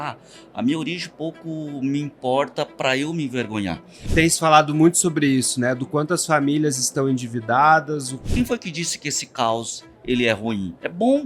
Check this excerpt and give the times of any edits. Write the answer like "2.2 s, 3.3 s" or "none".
3.9 s, 8.1 s